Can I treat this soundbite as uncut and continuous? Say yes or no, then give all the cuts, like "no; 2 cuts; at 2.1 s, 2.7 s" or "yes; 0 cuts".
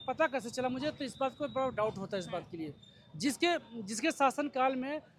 yes; 0 cuts